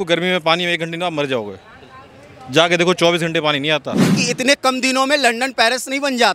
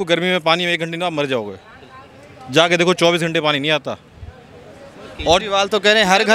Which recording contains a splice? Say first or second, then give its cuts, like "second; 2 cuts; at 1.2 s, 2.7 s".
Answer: first; 1 cut; at 4.2 s